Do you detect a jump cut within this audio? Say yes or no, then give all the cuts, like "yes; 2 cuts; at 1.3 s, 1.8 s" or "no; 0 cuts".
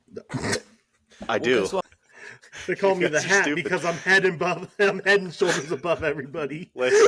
yes; 1 cut; at 1.8 s